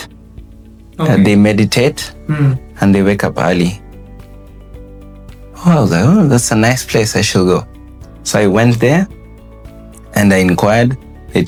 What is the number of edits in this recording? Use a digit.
0